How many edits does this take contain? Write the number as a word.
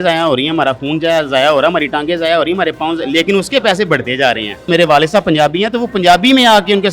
one